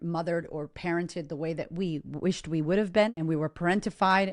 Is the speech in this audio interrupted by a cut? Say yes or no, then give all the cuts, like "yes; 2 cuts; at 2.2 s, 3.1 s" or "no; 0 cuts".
yes; 1 cut; at 3.2 s